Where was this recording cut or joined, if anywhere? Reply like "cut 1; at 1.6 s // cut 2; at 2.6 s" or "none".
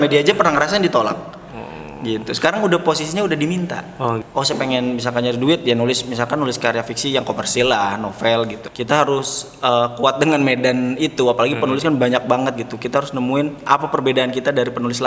cut 1; at 4.2 s // cut 2; at 8.6 s